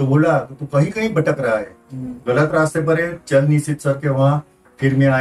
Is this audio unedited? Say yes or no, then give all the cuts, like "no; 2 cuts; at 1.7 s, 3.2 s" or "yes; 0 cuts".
yes; 0 cuts